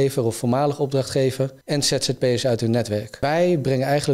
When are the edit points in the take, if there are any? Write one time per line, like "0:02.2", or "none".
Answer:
0:01.6
0:03.2